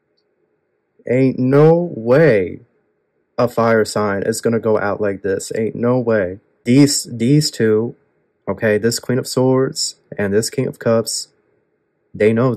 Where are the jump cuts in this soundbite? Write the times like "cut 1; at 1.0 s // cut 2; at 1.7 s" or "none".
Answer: cut 1; at 6.5 s